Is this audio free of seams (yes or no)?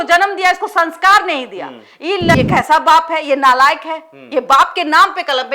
no